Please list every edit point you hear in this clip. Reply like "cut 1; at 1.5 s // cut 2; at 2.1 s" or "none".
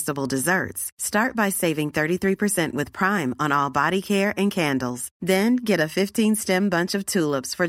none